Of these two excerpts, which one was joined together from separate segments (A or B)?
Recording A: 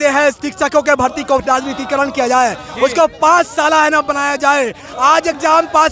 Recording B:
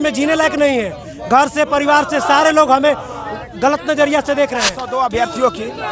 B